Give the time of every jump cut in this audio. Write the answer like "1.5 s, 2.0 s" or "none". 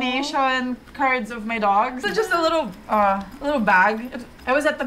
2.0 s